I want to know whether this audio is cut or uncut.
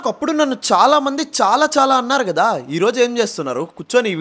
uncut